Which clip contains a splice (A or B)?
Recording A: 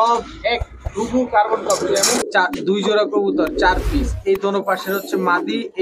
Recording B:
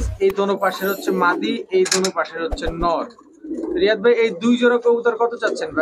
A